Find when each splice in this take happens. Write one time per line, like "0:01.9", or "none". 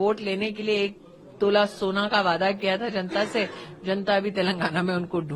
none